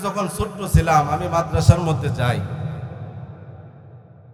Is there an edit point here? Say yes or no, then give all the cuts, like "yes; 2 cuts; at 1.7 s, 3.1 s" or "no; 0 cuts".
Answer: no; 0 cuts